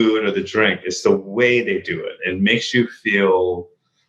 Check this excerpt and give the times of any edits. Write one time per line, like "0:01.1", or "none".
0:02.2